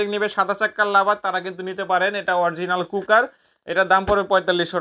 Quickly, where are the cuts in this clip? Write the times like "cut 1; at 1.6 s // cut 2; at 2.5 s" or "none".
none